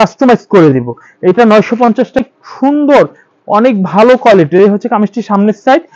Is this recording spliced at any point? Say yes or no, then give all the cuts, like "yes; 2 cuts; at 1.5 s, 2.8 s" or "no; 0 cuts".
yes; 1 cut; at 2.2 s